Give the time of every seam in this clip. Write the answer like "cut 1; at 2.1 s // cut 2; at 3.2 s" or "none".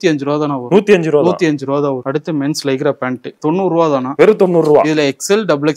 cut 1; at 2.0 s // cut 2; at 3.4 s